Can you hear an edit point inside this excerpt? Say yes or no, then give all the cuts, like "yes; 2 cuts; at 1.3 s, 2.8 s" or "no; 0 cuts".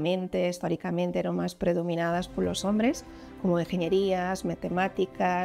no; 0 cuts